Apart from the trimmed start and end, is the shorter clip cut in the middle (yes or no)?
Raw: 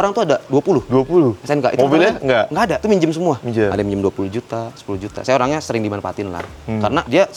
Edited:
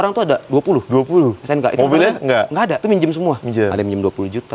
no